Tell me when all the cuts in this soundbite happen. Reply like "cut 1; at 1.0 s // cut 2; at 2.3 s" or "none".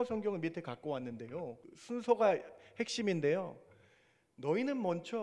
cut 1; at 1.7 s